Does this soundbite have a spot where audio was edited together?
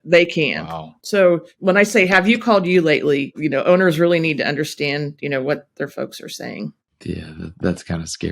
yes; 4 cuts; at 0.9 s, 1.5 s, 3.4 s, 6.9 s

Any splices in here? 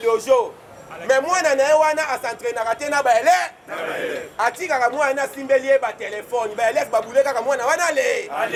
no; 0 cuts

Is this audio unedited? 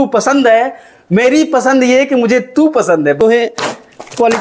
no; 1 cut; at 3.2 s

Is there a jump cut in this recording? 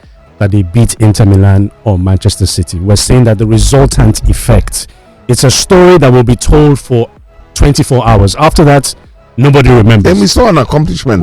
no; 0 cuts

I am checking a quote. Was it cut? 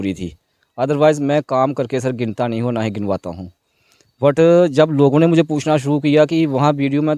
no; 0 cuts

